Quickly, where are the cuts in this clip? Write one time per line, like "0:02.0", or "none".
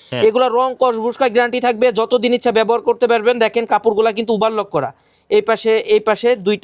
none

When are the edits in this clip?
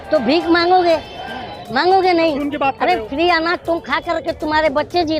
0:02.4

